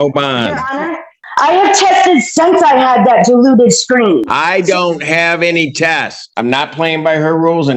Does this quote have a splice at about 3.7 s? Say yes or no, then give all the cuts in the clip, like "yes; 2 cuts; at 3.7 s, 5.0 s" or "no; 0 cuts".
no; 2 cuts; at 1.2 s, 6.3 s